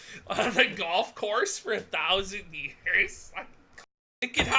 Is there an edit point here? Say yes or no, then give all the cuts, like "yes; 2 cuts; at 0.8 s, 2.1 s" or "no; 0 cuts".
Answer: yes; 1 cut; at 3.6 s